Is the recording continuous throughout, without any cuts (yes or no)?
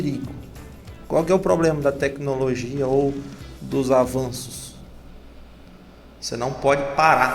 yes